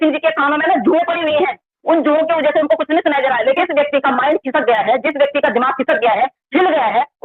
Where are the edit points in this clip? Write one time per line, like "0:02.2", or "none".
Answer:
0:03.6